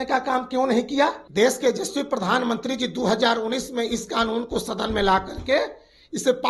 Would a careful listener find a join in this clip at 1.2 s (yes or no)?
yes